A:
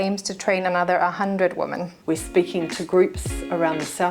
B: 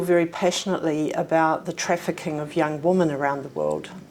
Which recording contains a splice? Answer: A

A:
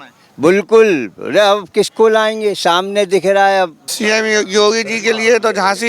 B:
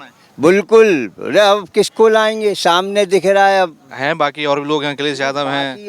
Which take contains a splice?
A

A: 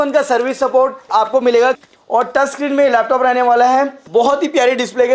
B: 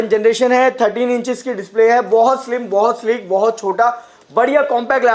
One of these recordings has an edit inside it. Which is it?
A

